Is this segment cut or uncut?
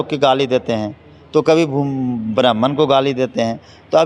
uncut